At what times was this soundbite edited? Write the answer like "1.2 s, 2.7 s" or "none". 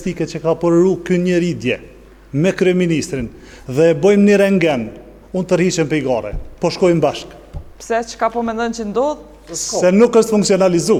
none